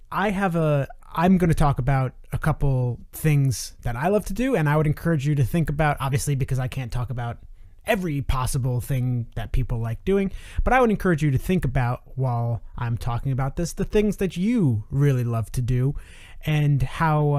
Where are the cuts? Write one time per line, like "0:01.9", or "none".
0:11.4